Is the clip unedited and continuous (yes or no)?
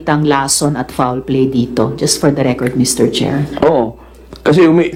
yes